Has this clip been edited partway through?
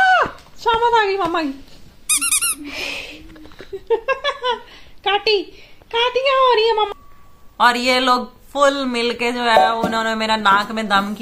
yes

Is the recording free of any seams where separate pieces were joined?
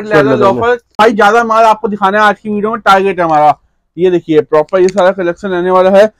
no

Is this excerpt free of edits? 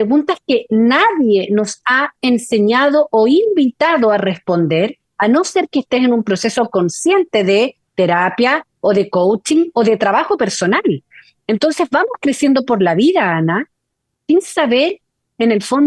yes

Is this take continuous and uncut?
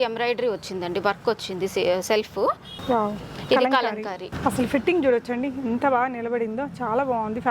no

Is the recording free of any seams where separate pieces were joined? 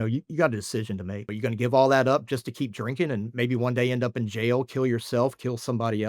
no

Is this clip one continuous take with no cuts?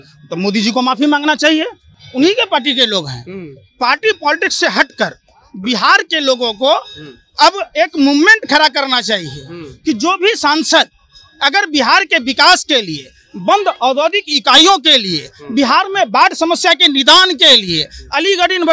yes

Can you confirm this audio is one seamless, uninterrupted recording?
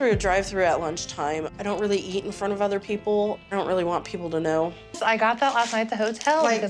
no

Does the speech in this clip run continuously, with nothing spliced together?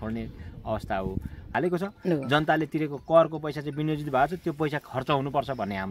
no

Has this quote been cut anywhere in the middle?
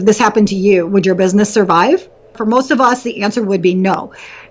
yes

